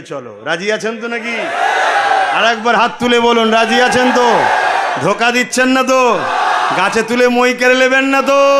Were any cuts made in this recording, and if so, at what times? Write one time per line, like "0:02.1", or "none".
none